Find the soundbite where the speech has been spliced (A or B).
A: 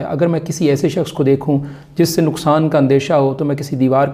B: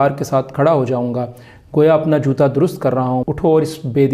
B